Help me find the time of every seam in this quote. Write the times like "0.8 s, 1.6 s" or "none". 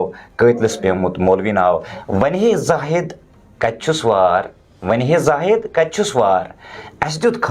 1.9 s